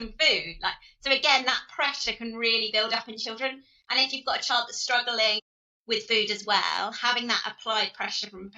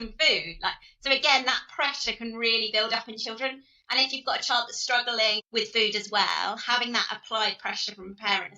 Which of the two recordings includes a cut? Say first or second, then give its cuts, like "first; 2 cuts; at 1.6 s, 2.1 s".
second; 1 cut; at 5.4 s